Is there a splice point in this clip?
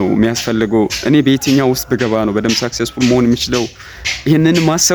no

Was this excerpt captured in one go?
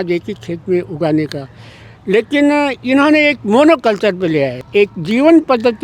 no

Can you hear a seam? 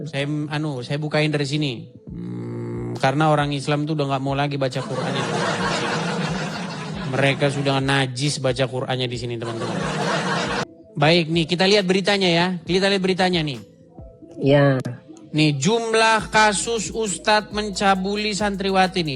yes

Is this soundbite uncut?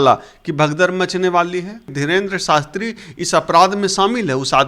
no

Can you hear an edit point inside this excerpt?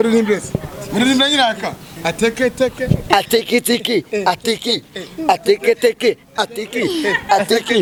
no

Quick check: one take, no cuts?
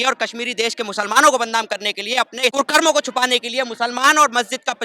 no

